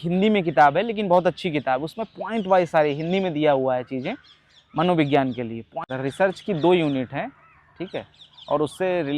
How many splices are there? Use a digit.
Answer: 1